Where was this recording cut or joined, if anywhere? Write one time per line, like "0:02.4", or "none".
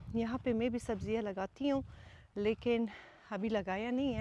none